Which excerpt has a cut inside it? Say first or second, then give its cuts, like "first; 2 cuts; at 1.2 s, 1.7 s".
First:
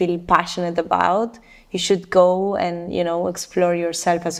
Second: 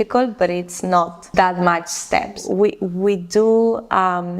second; 2 cuts; at 1.3 s, 2.4 s